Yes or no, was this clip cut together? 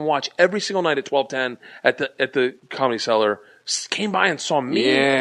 no